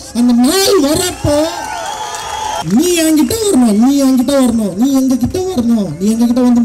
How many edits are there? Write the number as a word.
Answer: one